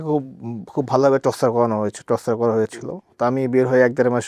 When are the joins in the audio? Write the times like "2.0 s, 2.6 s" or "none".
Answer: none